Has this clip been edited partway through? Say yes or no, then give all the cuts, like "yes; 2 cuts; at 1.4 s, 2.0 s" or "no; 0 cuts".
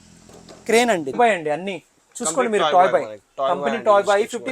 yes; 1 cut; at 1.2 s